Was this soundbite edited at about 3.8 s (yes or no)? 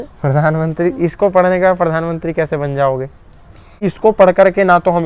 yes